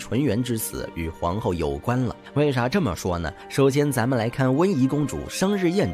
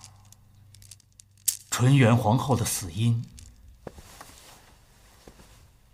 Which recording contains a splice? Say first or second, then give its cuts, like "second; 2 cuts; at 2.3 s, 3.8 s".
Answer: first; 2 cuts; at 2.2 s, 3.4 s